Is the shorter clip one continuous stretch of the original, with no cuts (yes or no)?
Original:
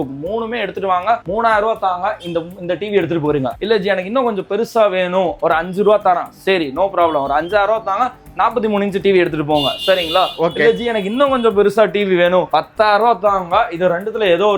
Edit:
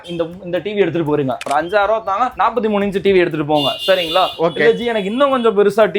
no